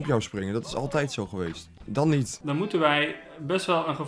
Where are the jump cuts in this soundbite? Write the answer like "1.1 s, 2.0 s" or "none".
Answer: 1.7 s, 2.4 s